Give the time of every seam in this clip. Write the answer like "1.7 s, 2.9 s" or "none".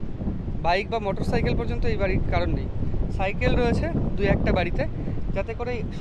none